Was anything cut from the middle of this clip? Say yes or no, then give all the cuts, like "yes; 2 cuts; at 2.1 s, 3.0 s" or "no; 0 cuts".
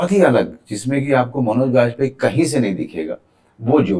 no; 0 cuts